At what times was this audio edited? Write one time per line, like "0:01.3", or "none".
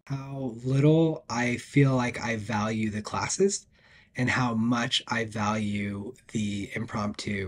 none